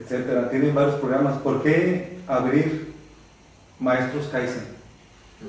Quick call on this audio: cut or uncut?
cut